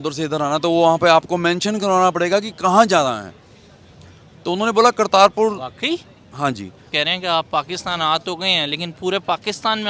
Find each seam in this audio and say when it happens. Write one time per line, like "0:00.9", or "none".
0:06.9